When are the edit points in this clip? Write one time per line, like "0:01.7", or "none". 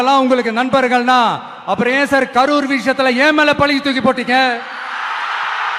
none

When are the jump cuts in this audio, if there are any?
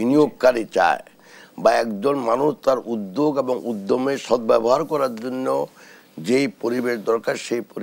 none

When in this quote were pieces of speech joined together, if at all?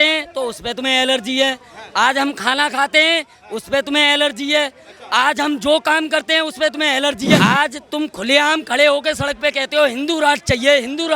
0:07.4

